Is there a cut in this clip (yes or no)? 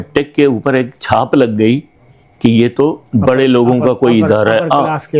no